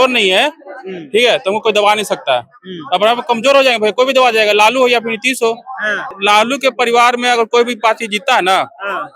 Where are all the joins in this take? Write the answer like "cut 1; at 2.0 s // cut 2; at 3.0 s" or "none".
cut 1; at 6.1 s